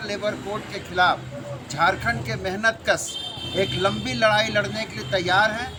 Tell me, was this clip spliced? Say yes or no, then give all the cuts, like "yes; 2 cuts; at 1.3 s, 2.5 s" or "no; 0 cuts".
no; 0 cuts